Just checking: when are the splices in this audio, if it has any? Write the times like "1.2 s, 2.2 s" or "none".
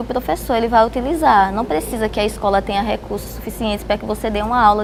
none